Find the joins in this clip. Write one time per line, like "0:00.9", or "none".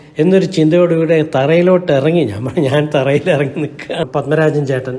0:04.1

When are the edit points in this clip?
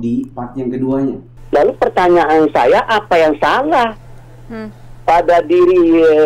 0:01.3

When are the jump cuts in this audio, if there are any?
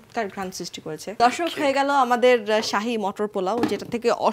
0:01.2

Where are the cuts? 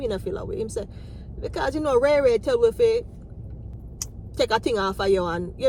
none

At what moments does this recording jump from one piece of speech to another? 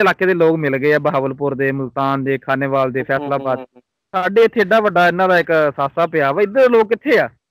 none

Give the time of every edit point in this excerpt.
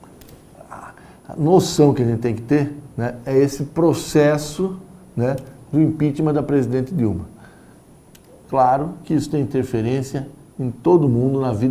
0:06.3

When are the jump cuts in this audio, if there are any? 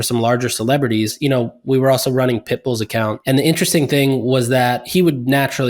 0:01.1
0:03.2
0:04.8

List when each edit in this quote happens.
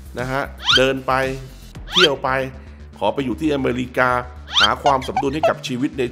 none

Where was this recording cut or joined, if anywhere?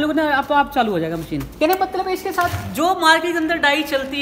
0:01.4

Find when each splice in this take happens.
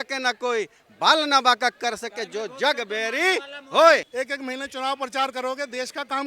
0:04.1

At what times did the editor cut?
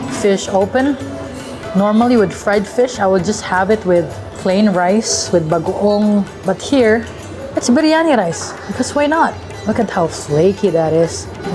none

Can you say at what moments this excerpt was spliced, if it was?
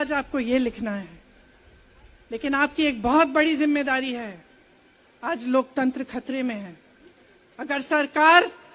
none

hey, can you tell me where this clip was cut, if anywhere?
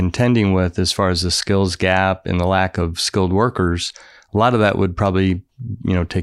none

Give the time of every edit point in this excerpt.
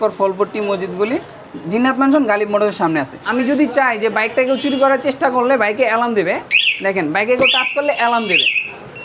0:03.2

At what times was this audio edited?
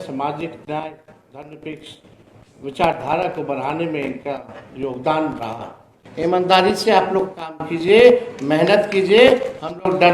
0:06.0

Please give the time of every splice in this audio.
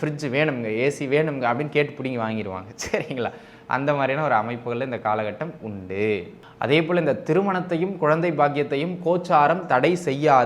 0:06.4

